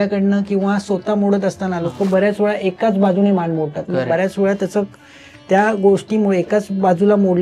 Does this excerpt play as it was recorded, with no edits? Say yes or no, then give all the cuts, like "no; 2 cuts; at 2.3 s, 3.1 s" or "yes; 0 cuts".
yes; 0 cuts